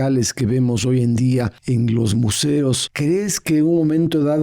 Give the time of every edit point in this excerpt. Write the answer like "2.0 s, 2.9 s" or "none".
1.6 s, 2.9 s